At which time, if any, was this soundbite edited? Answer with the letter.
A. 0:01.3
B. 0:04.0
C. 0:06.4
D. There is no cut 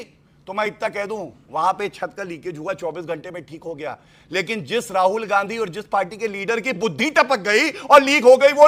D